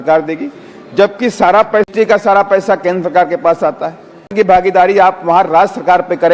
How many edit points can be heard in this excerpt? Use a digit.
2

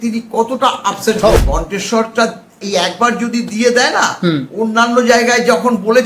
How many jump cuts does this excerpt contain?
2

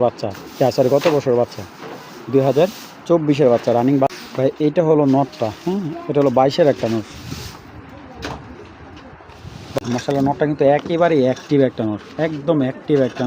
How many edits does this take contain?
2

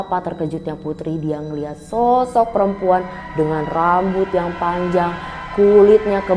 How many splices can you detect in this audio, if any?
0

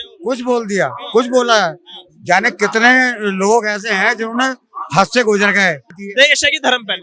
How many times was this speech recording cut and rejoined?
1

